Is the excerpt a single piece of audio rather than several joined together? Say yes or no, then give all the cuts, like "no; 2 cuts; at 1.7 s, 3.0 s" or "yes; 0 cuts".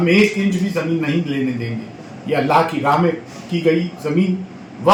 yes; 0 cuts